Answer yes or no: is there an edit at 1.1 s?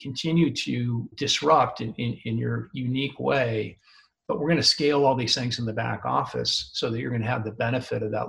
yes